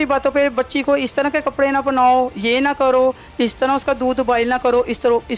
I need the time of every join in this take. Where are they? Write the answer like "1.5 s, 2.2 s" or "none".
none

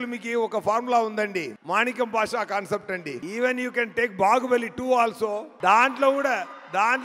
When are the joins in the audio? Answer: 1.6 s, 3.2 s, 5.5 s

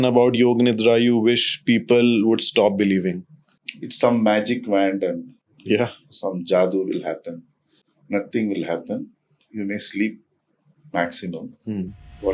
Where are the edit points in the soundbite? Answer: none

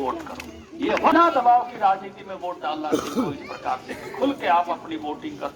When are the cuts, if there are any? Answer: 1.1 s

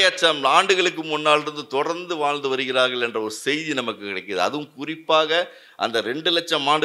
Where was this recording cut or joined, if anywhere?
none

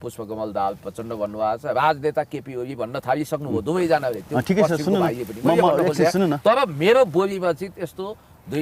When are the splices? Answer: none

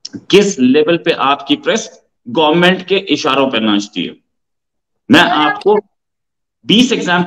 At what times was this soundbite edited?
none

